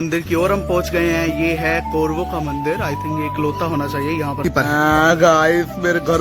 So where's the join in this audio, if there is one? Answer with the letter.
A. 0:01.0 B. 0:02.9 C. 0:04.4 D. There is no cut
C